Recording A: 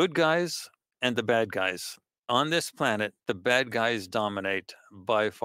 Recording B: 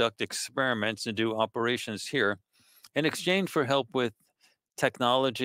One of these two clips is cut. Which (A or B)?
A